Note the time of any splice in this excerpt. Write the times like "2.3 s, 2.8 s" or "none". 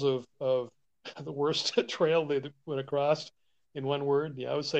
none

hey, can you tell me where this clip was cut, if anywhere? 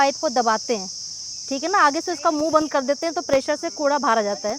none

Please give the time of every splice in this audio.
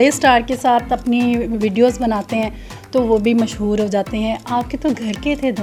none

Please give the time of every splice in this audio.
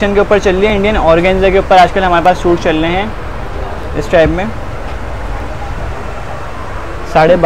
none

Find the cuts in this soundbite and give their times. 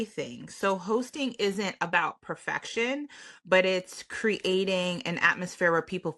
none

